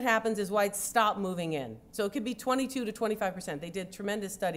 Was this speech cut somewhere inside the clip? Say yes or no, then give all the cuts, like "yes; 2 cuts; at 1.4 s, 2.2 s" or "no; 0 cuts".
no; 0 cuts